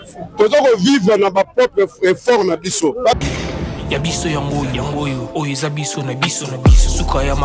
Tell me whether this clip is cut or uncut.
cut